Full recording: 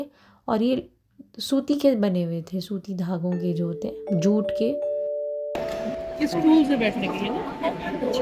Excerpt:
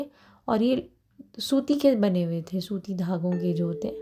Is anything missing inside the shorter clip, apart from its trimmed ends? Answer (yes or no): no